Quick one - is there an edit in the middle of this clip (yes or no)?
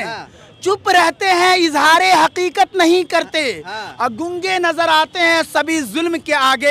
no